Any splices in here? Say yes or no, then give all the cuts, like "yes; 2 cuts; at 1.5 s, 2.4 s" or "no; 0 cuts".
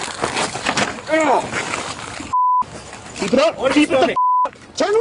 no; 0 cuts